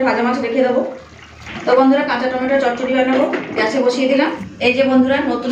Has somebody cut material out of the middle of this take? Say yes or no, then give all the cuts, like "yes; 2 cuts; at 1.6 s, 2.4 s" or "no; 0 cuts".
yes; 2 cuts; at 1.5 s, 4.5 s